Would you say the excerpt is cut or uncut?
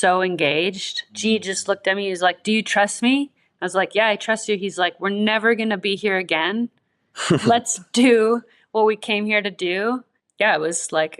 cut